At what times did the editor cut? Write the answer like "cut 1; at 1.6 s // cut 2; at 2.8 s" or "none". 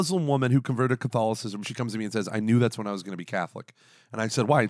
cut 1; at 1.7 s